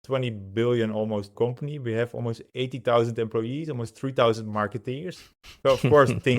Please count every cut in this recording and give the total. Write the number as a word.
one